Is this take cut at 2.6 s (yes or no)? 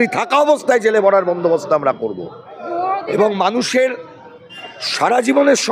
no